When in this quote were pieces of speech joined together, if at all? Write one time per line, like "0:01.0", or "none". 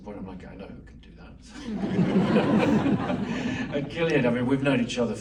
none